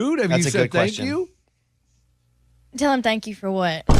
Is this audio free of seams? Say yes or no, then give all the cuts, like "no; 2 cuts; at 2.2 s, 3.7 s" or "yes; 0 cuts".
yes; 0 cuts